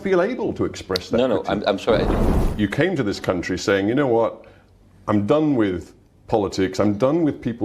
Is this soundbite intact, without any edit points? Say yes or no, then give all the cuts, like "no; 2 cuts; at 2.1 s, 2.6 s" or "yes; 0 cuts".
no; 1 cut; at 2.3 s